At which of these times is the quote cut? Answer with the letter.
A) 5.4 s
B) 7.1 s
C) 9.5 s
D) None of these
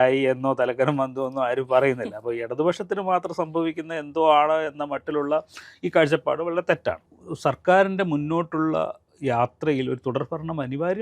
B